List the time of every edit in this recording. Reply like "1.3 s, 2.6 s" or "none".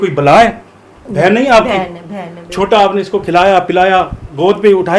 none